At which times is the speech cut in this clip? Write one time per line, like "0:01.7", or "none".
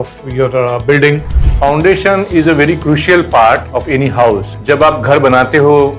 0:01.4
0:03.7
0:04.5